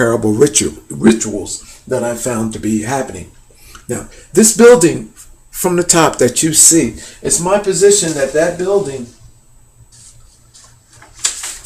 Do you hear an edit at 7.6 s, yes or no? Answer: no